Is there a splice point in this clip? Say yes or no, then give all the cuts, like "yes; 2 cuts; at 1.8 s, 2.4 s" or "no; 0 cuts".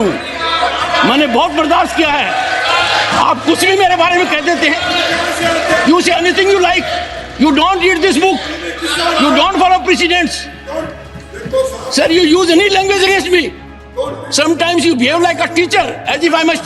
no; 0 cuts